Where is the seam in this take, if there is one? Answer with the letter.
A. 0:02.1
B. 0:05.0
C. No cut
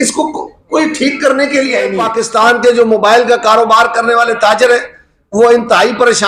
A